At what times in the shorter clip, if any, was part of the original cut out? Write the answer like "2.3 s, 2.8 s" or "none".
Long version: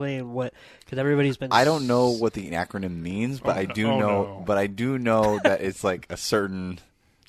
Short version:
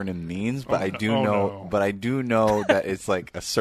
none

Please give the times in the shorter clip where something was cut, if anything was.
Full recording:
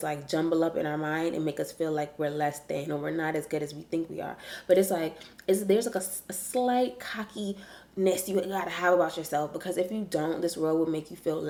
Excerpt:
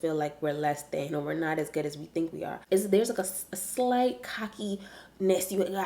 2.5 s

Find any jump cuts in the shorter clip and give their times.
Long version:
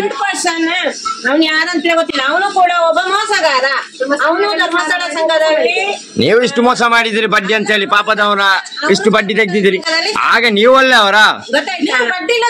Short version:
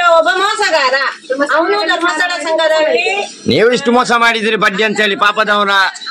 none

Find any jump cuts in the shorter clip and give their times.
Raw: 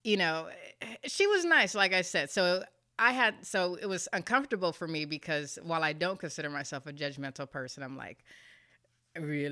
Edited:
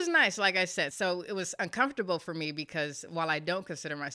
0.9 s

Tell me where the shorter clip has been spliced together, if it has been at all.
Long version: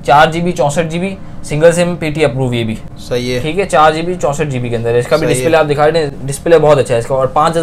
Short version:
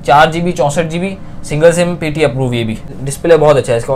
3.0 s

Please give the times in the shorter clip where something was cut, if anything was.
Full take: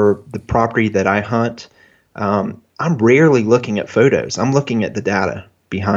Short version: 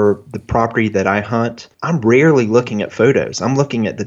1.7 s

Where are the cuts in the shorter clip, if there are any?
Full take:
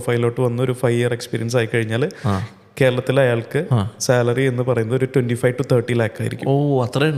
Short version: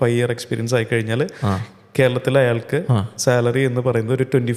none

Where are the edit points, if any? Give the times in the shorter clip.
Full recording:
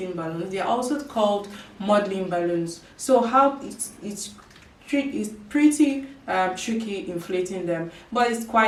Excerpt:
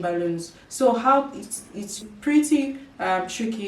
2.1 s

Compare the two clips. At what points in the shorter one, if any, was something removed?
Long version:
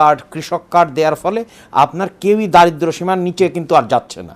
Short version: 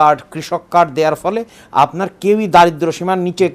none

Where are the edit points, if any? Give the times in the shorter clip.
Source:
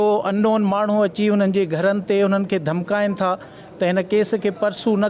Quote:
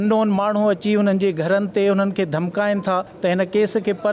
3.1 s

